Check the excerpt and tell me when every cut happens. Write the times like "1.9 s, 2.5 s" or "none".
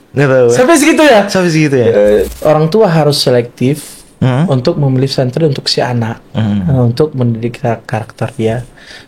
2.3 s